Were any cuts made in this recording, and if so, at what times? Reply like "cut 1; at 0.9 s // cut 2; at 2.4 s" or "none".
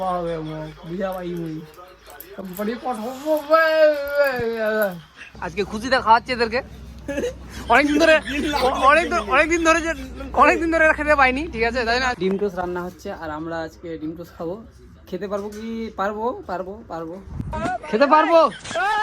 cut 1; at 5.4 s // cut 2; at 12.2 s

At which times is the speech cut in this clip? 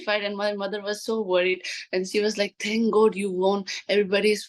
none

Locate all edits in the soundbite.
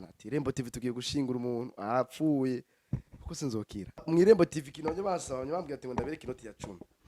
cut 1; at 4.0 s

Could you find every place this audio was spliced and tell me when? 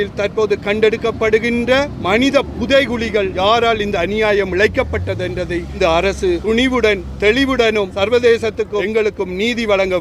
cut 1; at 2.0 s // cut 2; at 3.3 s // cut 3; at 5.8 s // cut 4; at 6.4 s // cut 5; at 7.9 s // cut 6; at 8.9 s

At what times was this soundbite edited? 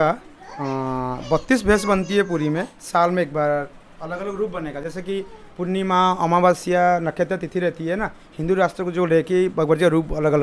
none

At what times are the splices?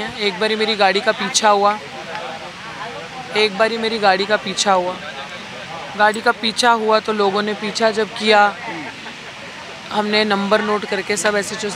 none

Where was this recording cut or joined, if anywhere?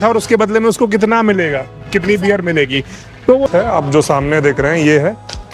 cut 1; at 3.5 s

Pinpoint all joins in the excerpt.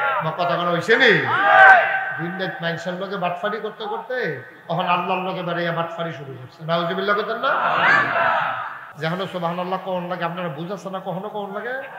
cut 1; at 8.9 s

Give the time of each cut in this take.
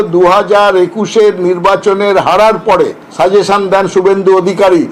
none

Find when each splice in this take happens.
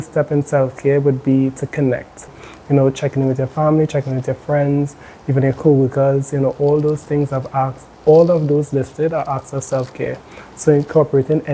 cut 1; at 2.3 s

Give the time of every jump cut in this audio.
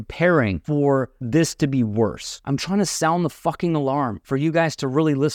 cut 1; at 0.8 s // cut 2; at 2.3 s // cut 3; at 4.2 s

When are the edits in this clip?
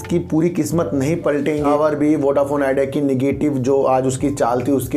cut 1; at 1.6 s

